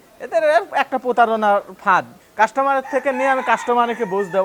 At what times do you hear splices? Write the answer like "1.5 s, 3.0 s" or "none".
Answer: 2.2 s